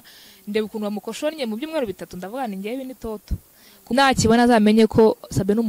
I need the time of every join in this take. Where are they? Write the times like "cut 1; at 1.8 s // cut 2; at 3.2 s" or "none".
cut 1; at 3.9 s